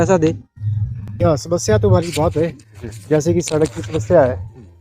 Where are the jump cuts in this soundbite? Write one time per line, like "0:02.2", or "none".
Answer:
0:01.1